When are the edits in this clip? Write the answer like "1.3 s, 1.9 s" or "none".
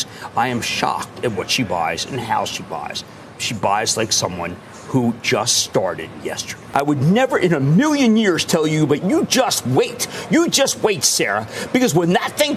6.6 s